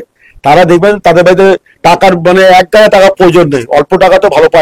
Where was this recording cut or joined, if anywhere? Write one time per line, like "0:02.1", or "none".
none